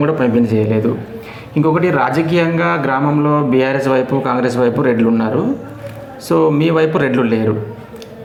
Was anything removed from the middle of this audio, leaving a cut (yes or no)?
no